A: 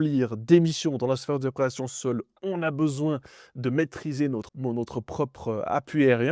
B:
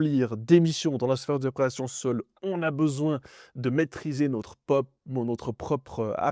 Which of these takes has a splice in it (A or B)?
A